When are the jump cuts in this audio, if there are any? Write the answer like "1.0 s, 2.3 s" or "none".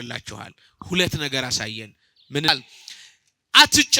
2.5 s